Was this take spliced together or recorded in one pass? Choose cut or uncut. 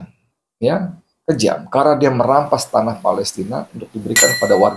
uncut